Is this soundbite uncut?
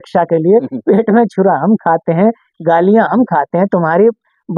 yes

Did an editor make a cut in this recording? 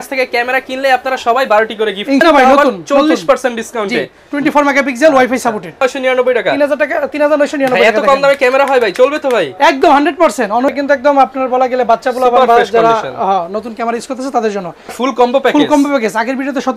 yes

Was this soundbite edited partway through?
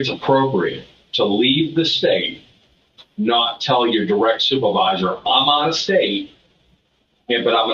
no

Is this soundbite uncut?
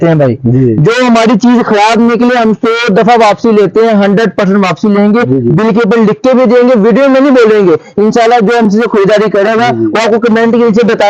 yes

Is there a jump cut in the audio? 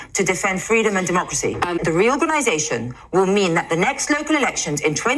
yes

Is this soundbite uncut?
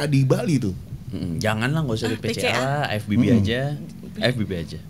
yes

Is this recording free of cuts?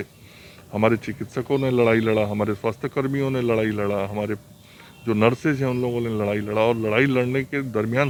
yes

